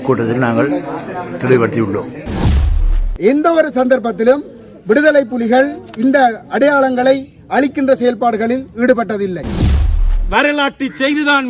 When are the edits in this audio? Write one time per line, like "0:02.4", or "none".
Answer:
0:02.7
0:09.9